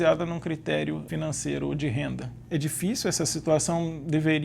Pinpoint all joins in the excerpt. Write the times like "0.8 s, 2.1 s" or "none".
1.0 s, 2.3 s

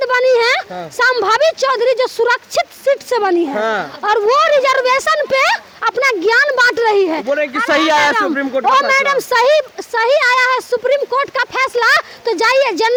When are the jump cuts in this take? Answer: none

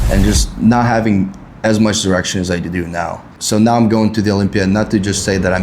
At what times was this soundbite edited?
3.3 s

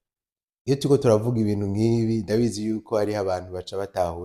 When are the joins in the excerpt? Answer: none

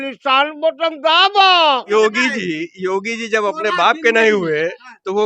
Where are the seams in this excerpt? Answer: 1.8 s

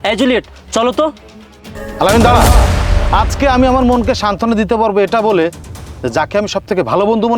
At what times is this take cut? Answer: 2.9 s

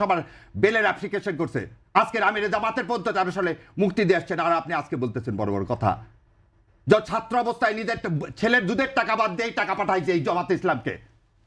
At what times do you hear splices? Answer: 7.8 s

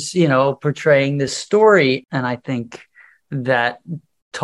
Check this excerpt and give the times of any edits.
1.4 s, 2.0 s

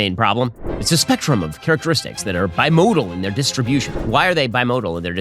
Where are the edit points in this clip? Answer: 3.9 s

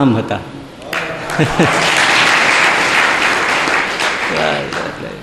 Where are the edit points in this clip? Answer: none

